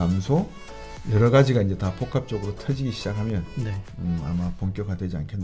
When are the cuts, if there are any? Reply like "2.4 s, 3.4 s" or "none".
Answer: none